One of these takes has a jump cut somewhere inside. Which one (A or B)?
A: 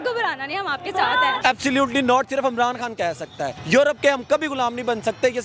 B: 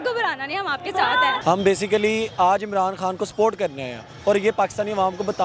A